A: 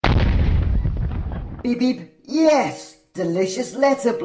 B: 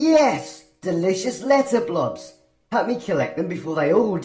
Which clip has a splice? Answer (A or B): A